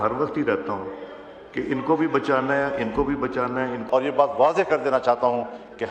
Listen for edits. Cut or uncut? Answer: cut